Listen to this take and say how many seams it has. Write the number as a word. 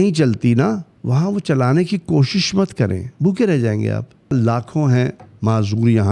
three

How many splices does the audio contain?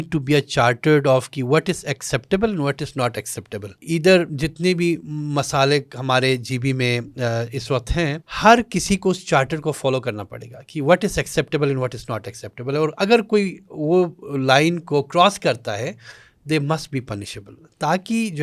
two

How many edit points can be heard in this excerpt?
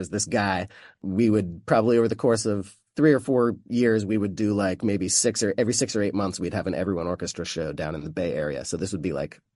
one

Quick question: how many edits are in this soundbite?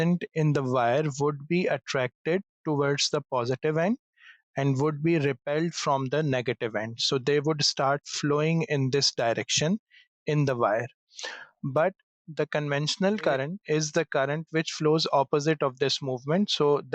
one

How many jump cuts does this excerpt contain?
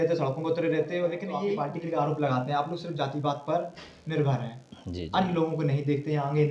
one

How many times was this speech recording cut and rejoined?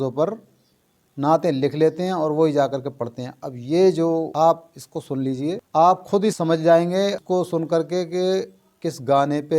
four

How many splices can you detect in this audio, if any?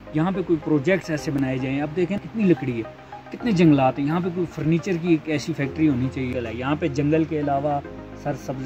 two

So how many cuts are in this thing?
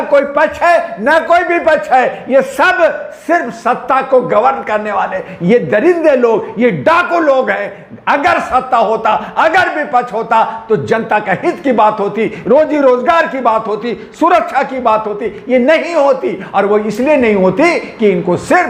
zero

